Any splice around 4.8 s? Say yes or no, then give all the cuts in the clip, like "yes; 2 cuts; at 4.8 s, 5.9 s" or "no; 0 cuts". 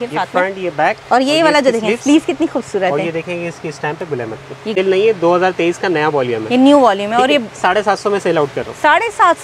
yes; 1 cut; at 4.8 s